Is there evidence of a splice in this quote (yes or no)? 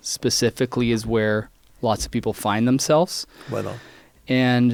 no